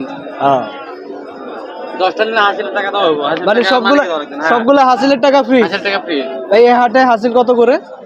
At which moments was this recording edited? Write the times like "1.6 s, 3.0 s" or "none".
none